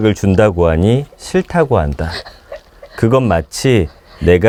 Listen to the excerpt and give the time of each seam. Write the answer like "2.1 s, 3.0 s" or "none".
none